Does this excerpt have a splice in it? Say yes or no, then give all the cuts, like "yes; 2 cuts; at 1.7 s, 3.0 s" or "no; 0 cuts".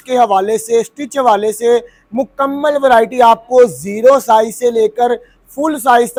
no; 0 cuts